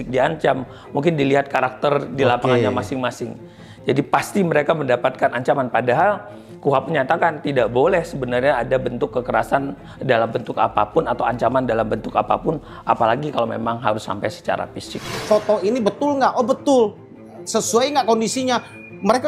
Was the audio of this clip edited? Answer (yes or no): yes